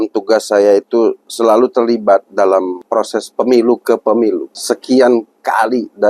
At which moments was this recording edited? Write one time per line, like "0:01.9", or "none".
0:02.8
0:04.5